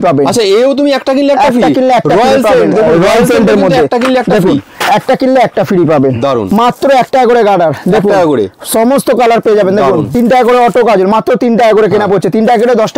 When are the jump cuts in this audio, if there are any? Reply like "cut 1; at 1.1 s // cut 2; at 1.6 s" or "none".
cut 1; at 6.4 s // cut 2; at 10.1 s